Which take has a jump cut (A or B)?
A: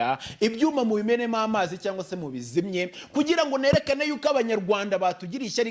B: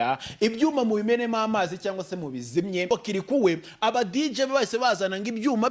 B